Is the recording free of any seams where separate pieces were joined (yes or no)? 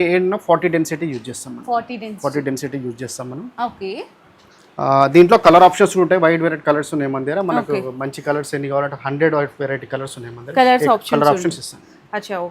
yes